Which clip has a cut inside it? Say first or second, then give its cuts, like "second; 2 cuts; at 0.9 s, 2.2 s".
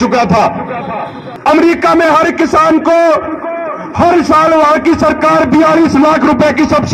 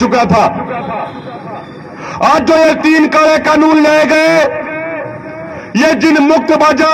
first; 1 cut; at 1.2 s